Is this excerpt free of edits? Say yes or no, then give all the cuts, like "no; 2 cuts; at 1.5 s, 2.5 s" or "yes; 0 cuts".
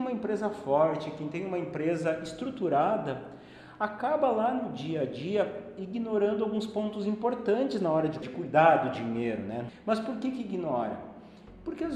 no; 2 cuts; at 8.2 s, 9.7 s